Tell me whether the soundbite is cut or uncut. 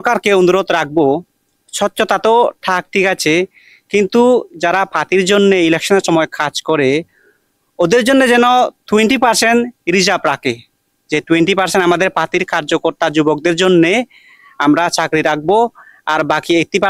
uncut